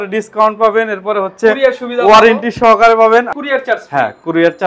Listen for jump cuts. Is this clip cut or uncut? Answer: cut